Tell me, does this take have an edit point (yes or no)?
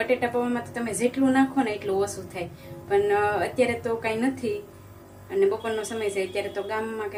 no